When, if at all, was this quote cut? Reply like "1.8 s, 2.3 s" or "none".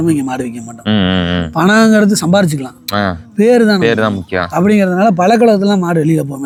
none